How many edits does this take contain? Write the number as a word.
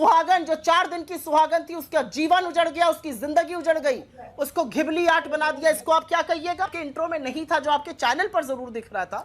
one